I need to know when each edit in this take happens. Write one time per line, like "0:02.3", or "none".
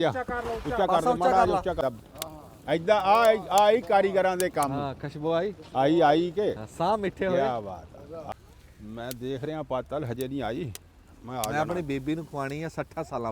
0:01.8
0:08.2